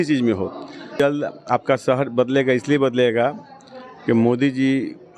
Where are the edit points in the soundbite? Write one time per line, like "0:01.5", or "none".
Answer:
0:00.9